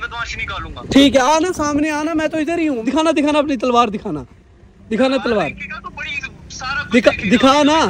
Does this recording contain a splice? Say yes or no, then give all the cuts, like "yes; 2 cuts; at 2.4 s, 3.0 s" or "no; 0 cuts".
yes; 1 cut; at 2.8 s